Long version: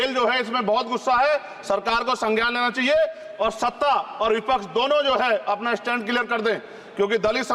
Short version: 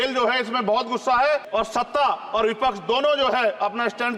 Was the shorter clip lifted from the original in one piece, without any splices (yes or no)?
no